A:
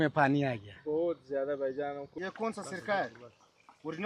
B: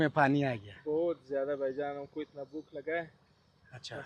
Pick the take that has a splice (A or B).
A